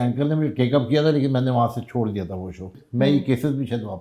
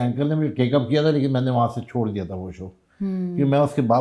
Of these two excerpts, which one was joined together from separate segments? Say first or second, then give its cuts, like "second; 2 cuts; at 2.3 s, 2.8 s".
first; 1 cut; at 2.8 s